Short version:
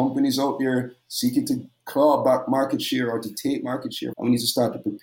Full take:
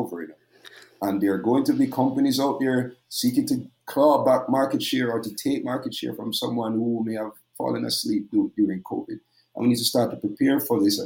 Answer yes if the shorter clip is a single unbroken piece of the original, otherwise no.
no